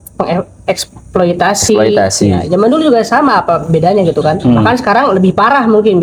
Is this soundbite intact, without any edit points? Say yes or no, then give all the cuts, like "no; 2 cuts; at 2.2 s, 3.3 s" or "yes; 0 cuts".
yes; 0 cuts